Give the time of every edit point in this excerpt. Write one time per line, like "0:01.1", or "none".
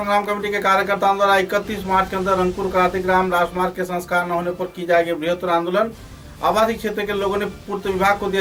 none